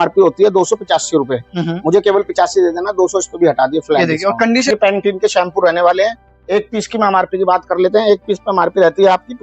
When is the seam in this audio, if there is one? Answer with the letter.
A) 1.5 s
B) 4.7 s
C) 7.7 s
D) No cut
B